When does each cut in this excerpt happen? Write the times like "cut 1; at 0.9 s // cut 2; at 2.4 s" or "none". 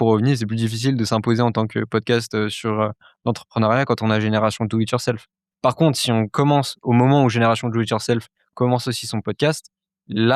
none